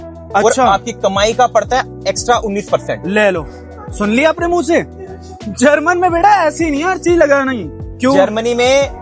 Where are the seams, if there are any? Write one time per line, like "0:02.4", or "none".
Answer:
none